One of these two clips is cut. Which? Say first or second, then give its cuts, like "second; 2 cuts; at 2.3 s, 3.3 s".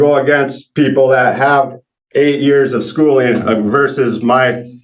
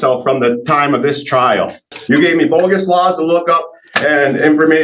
second; 1 cut; at 1.9 s